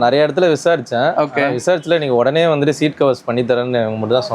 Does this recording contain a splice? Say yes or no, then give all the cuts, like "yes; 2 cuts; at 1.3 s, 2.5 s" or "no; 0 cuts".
no; 0 cuts